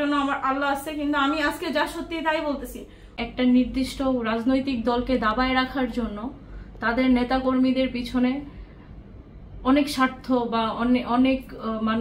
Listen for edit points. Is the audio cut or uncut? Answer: cut